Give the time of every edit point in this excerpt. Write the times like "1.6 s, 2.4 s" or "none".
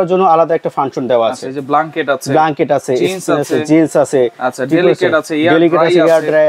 none